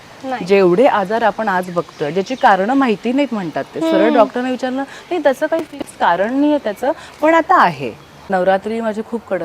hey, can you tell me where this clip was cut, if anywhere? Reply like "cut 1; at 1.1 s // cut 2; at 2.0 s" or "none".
cut 1; at 8.2 s